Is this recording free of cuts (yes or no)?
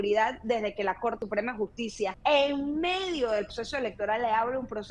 no